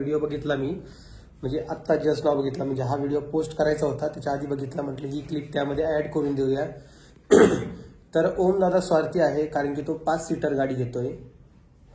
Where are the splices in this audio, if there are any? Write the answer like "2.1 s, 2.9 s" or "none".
none

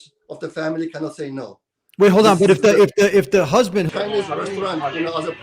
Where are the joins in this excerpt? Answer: 3.9 s

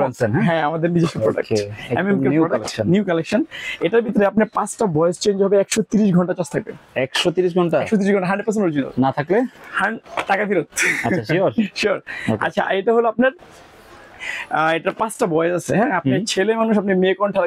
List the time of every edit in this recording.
none

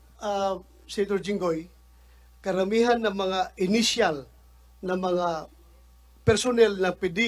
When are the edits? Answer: none

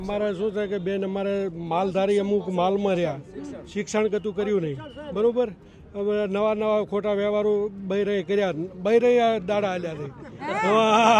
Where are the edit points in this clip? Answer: none

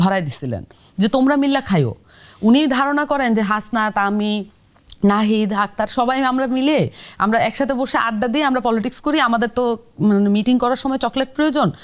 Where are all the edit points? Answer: none

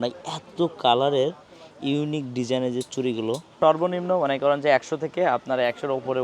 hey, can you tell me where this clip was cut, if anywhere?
3.5 s

